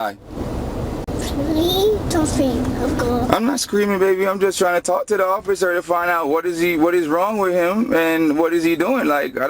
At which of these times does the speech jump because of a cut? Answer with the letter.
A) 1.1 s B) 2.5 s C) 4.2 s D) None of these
A